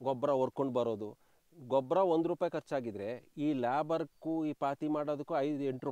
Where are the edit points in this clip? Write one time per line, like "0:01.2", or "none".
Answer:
none